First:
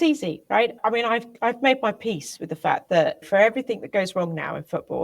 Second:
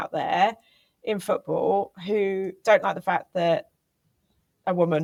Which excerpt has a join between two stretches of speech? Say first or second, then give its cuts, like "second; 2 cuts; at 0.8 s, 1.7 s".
first; 2 cuts; at 0.8 s, 3.2 s